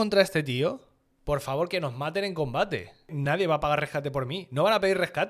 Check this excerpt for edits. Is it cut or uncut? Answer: cut